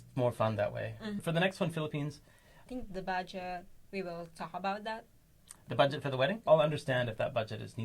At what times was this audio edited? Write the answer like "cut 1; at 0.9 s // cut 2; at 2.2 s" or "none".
cut 1; at 1.2 s // cut 2; at 2.5 s // cut 3; at 6.5 s